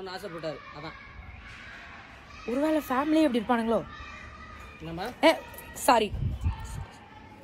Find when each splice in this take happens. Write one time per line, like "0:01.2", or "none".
0:01.2